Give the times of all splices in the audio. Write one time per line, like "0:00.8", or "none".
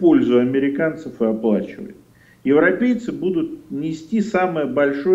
none

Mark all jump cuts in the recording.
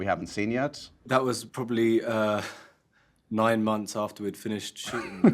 0:00.9

